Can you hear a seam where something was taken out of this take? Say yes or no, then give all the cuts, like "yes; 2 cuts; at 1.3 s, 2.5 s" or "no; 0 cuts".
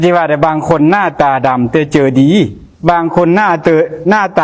no; 0 cuts